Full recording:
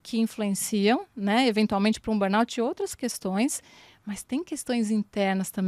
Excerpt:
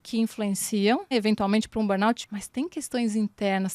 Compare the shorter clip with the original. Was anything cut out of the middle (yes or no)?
yes